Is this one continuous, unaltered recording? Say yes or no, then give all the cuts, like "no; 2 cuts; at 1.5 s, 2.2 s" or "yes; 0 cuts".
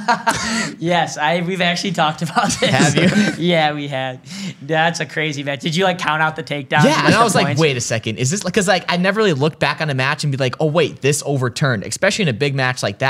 yes; 0 cuts